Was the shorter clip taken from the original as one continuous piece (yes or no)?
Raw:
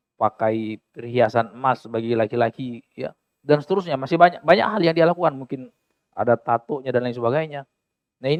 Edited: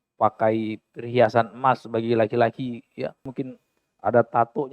no